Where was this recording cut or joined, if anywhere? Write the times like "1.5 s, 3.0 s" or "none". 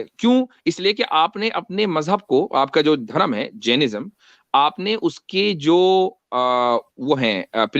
none